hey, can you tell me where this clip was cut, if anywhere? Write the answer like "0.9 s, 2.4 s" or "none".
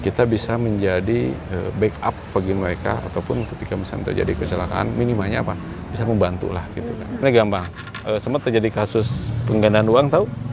7.2 s